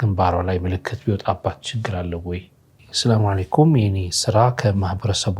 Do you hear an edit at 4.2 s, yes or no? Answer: no